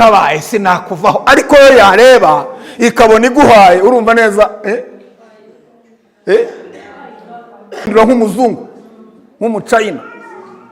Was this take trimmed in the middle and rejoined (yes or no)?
yes